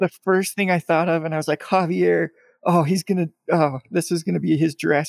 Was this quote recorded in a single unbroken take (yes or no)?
yes